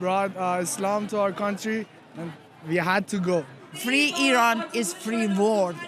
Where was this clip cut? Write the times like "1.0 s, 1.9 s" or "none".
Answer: 3.7 s